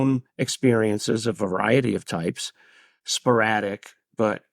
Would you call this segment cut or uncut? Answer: cut